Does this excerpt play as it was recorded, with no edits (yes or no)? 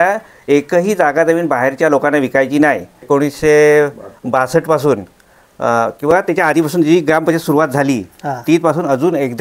no